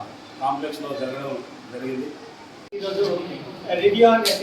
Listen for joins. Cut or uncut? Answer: cut